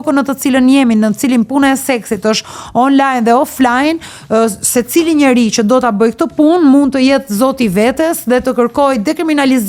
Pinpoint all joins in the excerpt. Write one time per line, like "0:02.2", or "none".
none